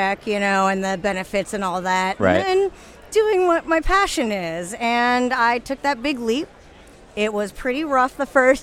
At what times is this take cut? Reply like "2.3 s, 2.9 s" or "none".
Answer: none